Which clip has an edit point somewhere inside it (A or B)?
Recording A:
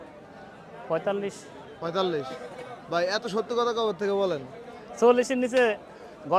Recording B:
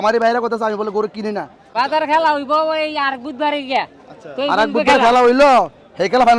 B